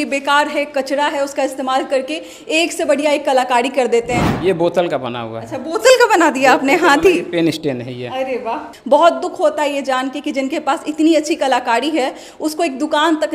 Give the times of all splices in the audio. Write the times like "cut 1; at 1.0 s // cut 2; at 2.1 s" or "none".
cut 1; at 4.3 s // cut 2; at 8.6 s